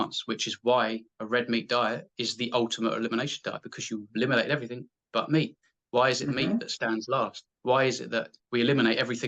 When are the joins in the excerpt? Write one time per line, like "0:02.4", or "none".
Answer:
0:07.5
0:08.4